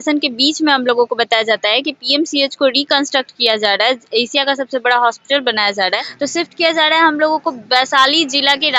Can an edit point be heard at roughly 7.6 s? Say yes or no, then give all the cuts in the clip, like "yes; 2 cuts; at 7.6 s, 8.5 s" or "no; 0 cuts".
no; 1 cut; at 6.1 s